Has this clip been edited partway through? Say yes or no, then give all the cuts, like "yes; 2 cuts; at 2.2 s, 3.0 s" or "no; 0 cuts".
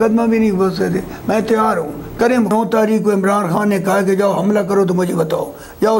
yes; 1 cut; at 2.5 s